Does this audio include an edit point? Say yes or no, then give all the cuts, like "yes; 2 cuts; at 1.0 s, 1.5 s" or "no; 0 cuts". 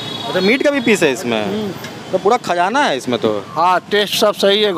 yes; 1 cut; at 3.5 s